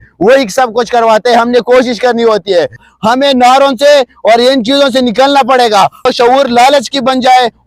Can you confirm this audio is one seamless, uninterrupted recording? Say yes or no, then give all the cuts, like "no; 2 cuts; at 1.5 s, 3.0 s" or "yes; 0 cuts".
no; 2 cuts; at 2.8 s, 6.0 s